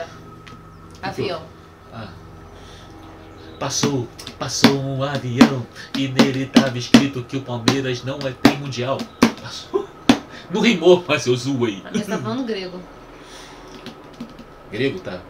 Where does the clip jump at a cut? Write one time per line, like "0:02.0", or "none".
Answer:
none